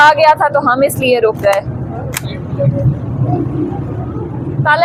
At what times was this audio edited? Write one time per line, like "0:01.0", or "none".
none